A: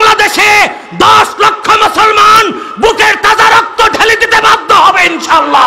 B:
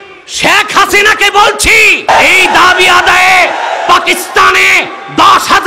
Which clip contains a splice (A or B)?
B